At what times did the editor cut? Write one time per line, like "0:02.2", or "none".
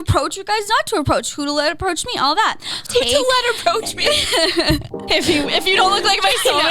0:02.8
0:04.9